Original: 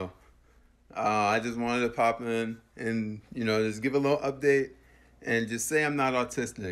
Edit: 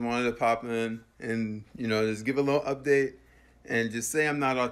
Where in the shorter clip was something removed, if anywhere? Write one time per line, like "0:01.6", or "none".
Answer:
none